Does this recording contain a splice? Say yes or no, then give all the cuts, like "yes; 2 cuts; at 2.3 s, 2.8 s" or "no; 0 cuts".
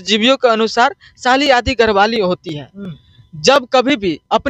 no; 0 cuts